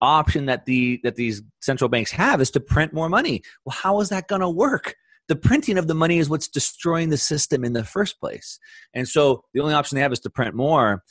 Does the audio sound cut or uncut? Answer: uncut